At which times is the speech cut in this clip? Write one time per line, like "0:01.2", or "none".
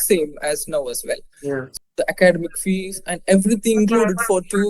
0:01.7